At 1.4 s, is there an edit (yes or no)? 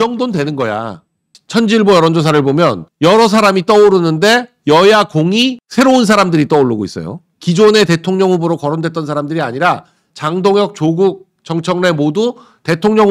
yes